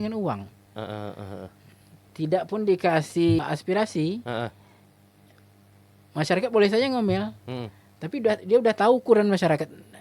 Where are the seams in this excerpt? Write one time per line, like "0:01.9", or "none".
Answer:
0:03.4